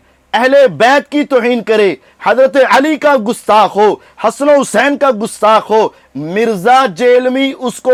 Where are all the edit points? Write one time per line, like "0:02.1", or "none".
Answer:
none